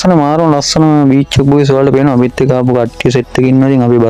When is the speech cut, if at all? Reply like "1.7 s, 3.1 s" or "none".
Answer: none